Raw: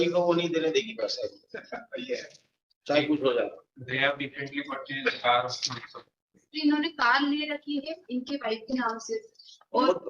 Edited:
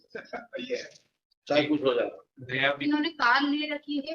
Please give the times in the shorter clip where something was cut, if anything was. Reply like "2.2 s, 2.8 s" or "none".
2.8 s